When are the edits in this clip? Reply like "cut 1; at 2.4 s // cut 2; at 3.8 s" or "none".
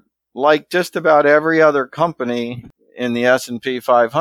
none